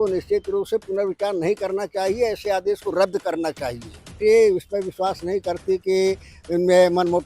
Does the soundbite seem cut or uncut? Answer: cut